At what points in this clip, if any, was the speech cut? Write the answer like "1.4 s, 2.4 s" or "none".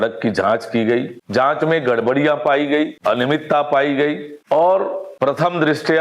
1.2 s, 2.9 s, 4.3 s, 5.0 s

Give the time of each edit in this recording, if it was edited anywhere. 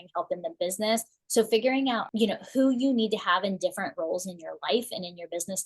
1.1 s, 2.1 s

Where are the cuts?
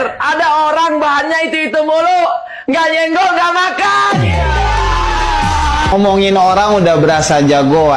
none

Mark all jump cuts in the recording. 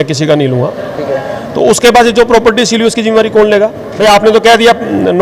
3.8 s

